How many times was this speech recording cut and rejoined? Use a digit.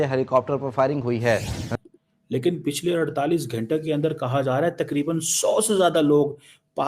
1